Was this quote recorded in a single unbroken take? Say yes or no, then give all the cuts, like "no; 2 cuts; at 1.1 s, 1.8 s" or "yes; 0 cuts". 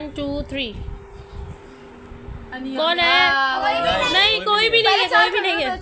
yes; 0 cuts